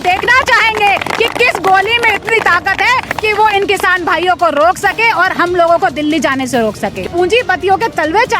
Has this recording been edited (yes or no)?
yes